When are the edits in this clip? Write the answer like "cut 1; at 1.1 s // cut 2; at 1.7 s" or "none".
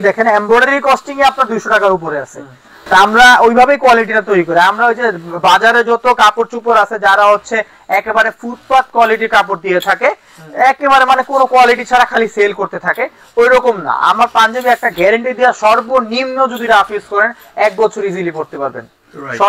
none